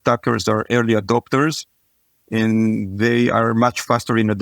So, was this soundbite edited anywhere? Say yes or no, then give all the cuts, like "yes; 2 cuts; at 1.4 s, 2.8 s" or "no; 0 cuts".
no; 0 cuts